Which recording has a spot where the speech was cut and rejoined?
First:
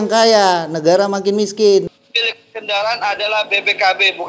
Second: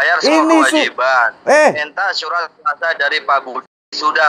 first; 1 cut; at 1.9 s

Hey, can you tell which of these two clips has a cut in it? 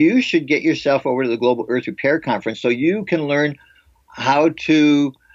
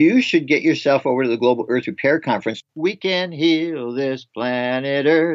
second; 1 cut; at 2.6 s

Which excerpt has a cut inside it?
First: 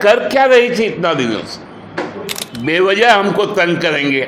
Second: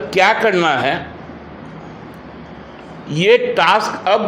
first; 1 cut; at 2.4 s

